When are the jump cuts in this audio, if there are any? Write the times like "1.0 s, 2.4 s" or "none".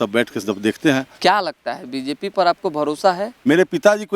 1.1 s, 3.3 s